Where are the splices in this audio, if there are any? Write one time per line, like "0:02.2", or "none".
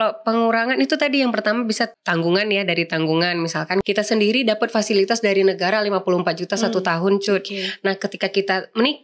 0:01.9
0:03.8